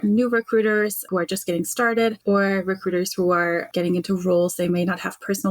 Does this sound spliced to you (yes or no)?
yes